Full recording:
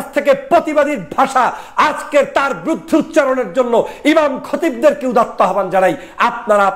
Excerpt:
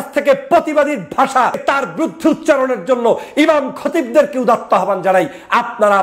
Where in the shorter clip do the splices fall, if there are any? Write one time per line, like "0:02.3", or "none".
0:01.6